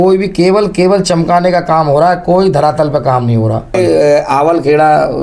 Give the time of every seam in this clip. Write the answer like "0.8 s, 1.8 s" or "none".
3.8 s

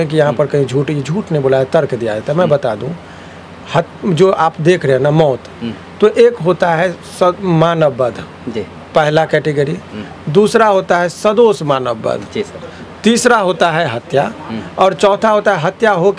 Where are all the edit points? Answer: none

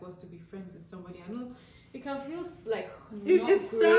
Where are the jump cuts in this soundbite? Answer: none

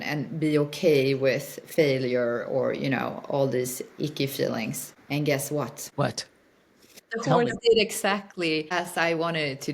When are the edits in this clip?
4.9 s, 5.8 s, 7.0 s, 8.7 s

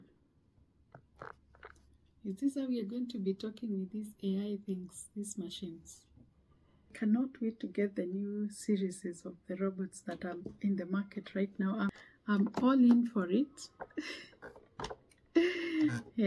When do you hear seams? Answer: 6.9 s, 11.9 s

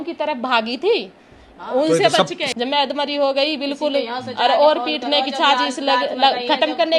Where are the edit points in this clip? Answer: 2.4 s

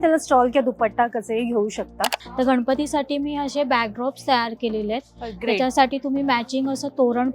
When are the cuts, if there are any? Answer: 2.2 s

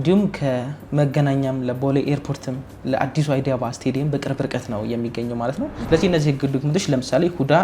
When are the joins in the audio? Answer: 5.8 s

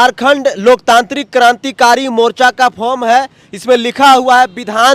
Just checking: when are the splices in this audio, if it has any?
none

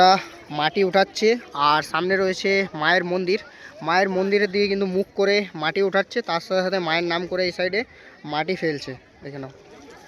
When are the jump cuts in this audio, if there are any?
none

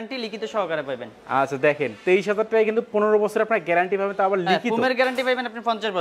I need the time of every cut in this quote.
none

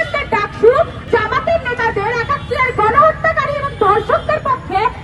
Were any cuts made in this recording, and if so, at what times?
1.1 s

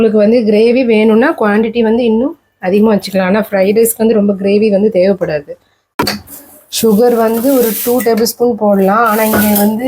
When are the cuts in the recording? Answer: 5.9 s

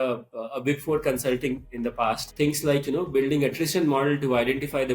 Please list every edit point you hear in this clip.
2.3 s

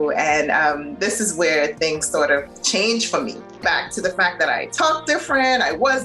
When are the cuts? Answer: 2.5 s, 3.6 s

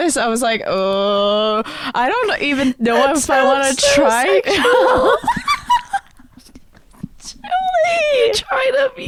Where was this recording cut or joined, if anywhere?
none

